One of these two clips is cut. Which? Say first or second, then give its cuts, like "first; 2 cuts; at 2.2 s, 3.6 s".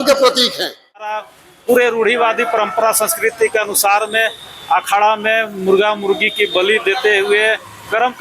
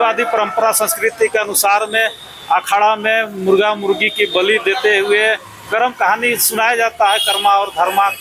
first; 1 cut; at 1.2 s